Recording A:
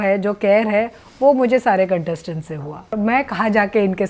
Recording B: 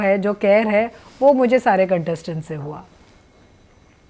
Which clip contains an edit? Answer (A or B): A